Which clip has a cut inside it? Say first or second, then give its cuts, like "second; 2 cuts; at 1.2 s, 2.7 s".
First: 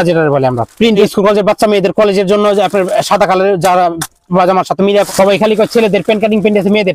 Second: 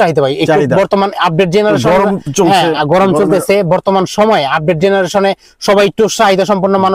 first; 2 cuts; at 1.1 s, 5.1 s